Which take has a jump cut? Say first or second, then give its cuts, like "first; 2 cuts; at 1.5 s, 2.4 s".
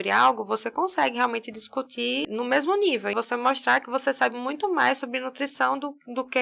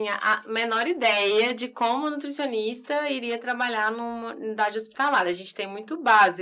first; 2 cuts; at 2.2 s, 3.1 s